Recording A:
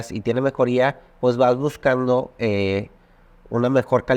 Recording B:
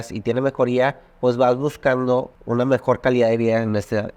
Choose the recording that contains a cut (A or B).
B